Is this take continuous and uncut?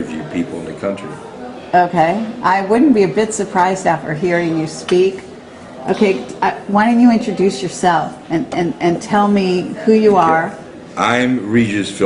yes; 0 cuts

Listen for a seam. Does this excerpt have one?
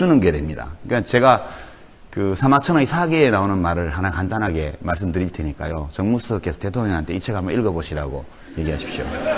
no; 0 cuts

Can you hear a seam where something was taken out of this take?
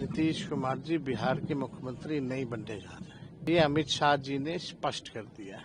yes; 1 cut; at 3.5 s

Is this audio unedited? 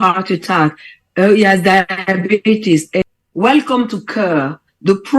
no; 1 cut; at 3.2 s

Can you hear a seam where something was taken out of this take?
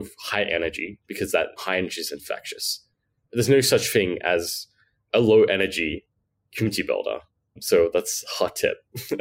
yes; 1 cut; at 1.6 s

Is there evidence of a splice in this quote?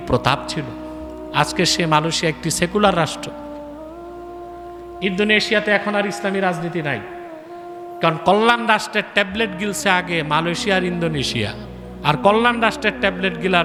no; 0 cuts

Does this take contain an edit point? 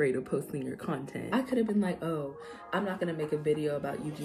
yes; 1 cut; at 1.2 s

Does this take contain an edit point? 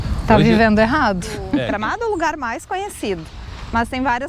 yes; 1 cut; at 1.3 s

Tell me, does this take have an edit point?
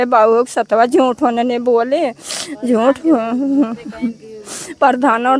no; 0 cuts

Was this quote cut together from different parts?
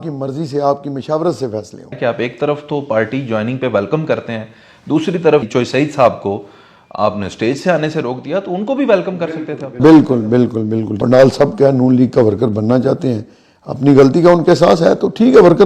yes; 2 cuts; at 2.0 s, 10.9 s

